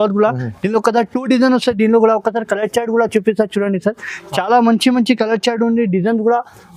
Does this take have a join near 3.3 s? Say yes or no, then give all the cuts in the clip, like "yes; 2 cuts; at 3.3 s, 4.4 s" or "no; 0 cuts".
no; 0 cuts